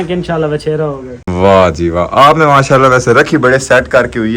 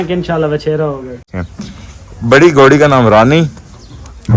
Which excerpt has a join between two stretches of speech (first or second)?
second